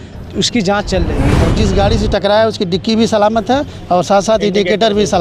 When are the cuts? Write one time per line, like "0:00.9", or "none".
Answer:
0:01.3